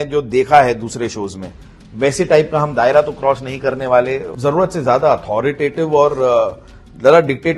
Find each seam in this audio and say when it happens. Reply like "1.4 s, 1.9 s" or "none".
4.3 s